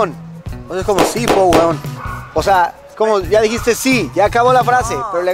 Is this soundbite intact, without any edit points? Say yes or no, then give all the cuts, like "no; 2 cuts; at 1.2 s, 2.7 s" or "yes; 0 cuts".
yes; 0 cuts